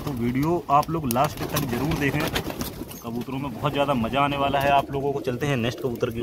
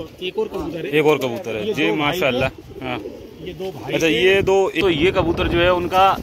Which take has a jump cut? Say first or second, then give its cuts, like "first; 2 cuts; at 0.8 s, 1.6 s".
second; 1 cut; at 4.8 s